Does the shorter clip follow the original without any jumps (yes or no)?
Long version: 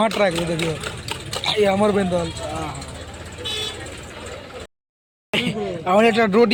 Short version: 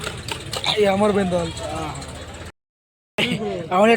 no